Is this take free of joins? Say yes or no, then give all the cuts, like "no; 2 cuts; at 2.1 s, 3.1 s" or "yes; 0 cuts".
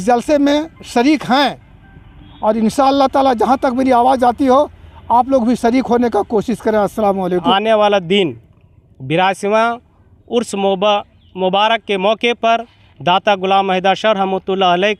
no; 1 cut; at 7.4 s